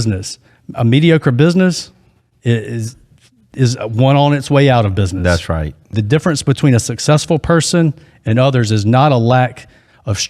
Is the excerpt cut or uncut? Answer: cut